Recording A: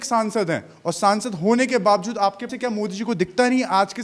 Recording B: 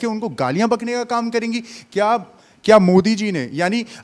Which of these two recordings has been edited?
A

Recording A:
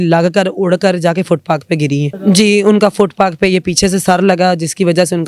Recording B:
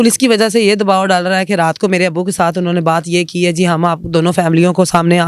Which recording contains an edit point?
A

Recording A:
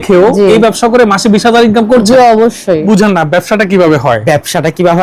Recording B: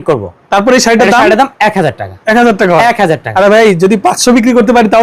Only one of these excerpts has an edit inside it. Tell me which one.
A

